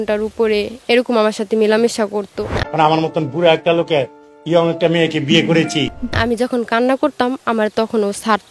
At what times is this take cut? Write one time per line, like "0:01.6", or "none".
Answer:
0:02.7
0:06.1